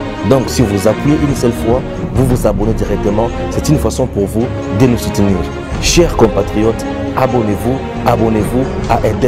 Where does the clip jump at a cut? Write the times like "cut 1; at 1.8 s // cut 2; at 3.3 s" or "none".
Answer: none